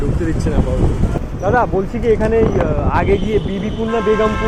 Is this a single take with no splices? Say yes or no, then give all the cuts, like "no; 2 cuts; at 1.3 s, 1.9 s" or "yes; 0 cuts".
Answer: yes; 0 cuts